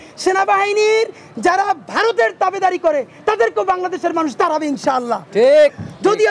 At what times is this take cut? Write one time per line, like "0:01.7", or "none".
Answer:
none